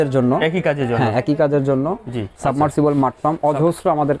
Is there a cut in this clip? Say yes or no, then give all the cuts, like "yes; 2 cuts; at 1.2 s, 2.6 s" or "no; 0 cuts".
yes; 1 cut; at 2.3 s